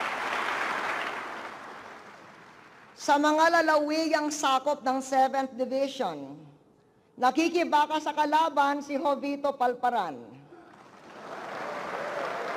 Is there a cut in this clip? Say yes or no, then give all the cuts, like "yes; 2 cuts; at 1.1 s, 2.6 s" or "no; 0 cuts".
no; 0 cuts